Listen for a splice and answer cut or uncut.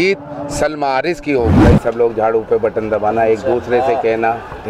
cut